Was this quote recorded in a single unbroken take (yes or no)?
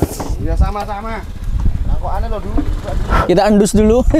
no